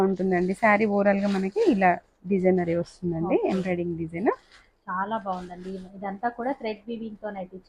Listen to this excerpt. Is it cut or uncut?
uncut